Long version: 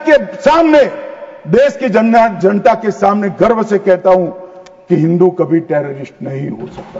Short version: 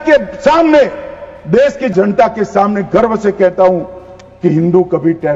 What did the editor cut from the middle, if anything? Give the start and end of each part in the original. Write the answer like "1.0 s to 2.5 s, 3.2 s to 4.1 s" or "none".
1.9 s to 2.4 s